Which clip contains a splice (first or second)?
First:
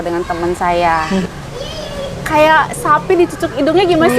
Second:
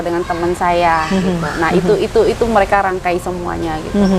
first